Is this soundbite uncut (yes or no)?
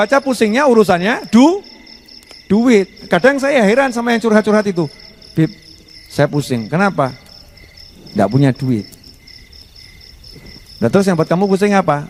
yes